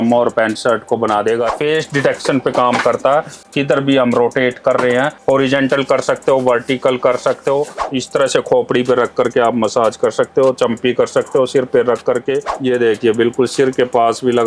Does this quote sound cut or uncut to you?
cut